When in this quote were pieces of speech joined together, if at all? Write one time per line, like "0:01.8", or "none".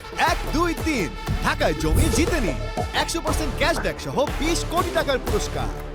none